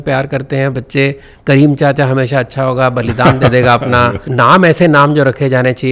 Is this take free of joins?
no; 1 cut; at 4.2 s

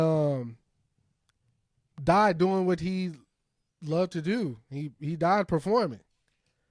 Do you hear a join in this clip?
no; 0 cuts

